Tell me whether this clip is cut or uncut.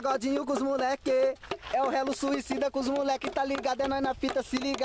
uncut